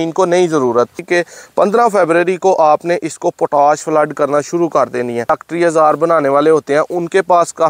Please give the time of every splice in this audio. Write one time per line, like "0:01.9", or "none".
0:01.0
0:05.3